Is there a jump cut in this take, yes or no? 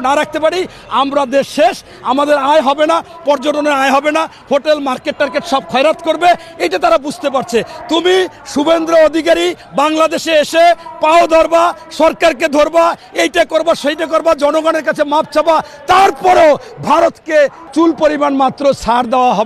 yes